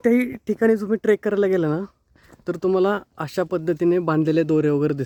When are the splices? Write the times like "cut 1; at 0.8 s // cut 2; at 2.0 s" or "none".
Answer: none